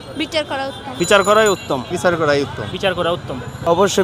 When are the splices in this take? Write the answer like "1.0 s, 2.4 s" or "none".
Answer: 0.9 s, 1.9 s, 2.7 s